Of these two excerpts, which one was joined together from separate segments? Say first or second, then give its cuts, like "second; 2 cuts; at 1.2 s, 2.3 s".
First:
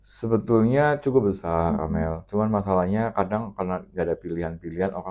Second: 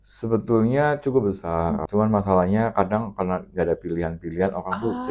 second; 1 cut; at 1.8 s